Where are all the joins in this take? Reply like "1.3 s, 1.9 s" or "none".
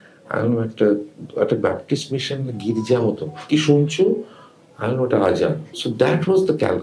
5.7 s